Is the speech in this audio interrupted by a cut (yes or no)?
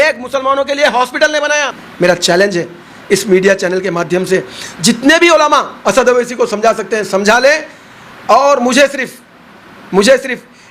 yes